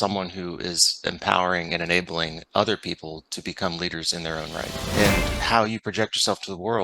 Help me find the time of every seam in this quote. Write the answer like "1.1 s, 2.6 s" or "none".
4.8 s